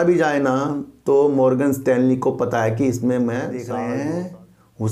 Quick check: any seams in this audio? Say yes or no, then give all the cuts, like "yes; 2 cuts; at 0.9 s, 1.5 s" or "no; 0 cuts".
yes; 1 cut; at 3.6 s